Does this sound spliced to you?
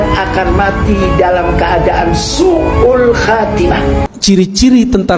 yes; 1 cut; at 4.1 s

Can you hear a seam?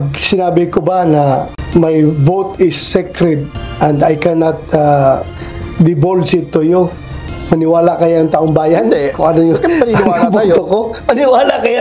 no; 0 cuts

